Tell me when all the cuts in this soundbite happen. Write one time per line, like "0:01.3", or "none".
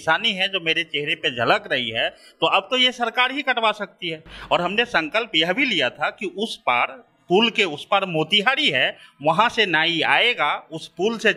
none